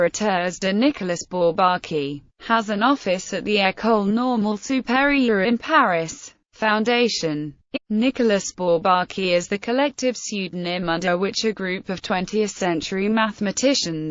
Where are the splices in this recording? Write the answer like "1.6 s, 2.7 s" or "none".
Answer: none